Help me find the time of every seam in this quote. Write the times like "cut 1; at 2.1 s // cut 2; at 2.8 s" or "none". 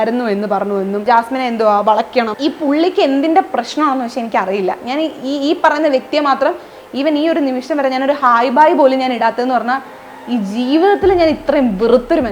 cut 1; at 1.0 s // cut 2; at 2.3 s